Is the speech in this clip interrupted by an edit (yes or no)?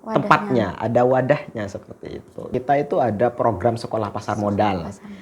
yes